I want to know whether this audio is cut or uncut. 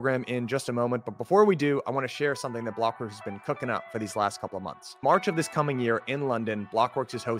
uncut